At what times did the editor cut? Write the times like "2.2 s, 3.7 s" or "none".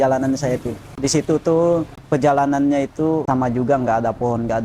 0.9 s, 2.0 s, 3.2 s